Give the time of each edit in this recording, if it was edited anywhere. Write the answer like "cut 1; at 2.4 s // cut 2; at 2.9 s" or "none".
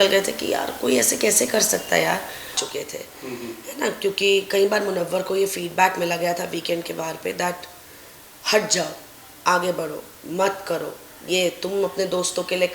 cut 1; at 2.6 s